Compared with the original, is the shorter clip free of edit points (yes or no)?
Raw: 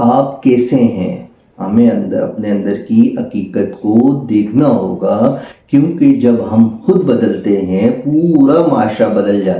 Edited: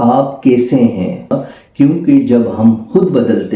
no